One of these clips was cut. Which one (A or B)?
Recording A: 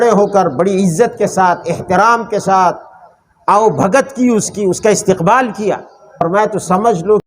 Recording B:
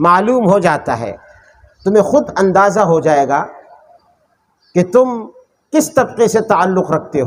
A